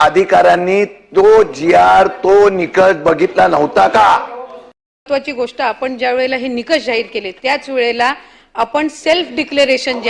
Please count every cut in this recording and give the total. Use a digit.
1